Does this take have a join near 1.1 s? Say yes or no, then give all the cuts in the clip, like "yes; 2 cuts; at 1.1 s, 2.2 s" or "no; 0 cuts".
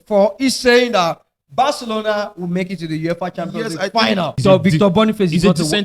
no; 1 cut; at 4.4 s